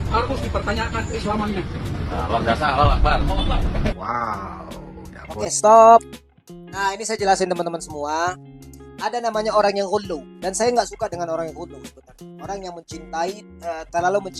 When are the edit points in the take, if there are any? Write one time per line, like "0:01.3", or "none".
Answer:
none